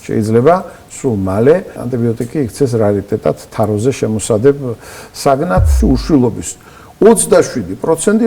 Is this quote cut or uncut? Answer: cut